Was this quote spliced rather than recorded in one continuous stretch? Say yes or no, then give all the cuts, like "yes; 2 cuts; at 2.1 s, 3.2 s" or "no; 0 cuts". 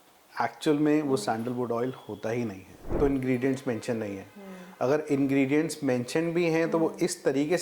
yes; 1 cut; at 2.9 s